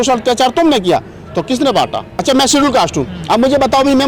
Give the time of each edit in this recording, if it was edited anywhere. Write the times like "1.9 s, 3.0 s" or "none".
2.2 s